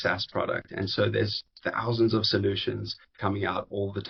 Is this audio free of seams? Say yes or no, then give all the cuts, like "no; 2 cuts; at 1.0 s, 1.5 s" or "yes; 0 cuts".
yes; 0 cuts